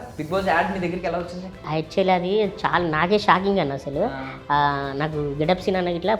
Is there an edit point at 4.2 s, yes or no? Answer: no